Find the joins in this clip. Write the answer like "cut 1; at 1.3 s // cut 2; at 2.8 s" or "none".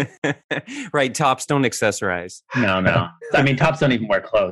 cut 1; at 3.3 s